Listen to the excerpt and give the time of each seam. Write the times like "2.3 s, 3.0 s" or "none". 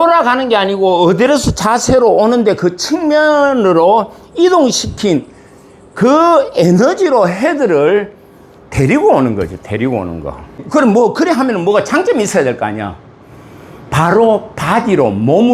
10.6 s